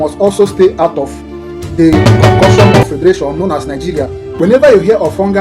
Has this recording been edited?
yes; 1 cut; at 4.3 s

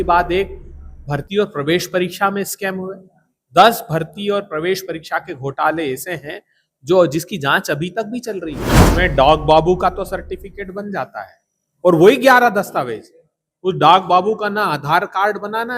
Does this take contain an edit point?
yes; 1 cut; at 8.9 s

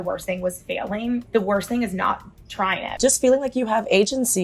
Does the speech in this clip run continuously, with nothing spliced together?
no; 2 cuts; at 1.2 s, 2.9 s

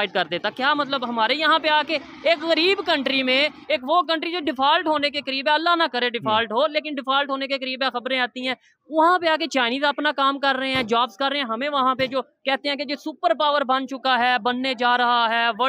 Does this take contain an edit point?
no; 0 cuts

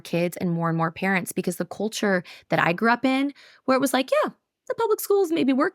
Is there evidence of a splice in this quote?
no; 0 cuts

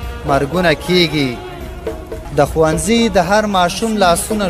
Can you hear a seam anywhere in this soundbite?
yes; 1 cut; at 2.2 s

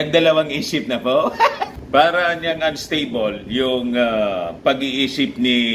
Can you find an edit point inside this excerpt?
yes; 1 cut; at 1.8 s

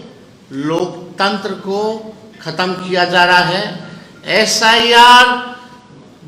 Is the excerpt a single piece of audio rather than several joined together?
yes; 0 cuts

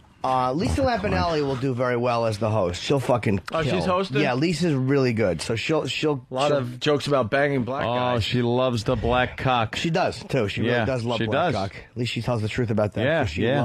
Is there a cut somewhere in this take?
yes; 1 cut; at 12.3 s

